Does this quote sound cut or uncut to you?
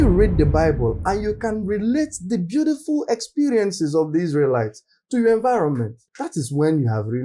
uncut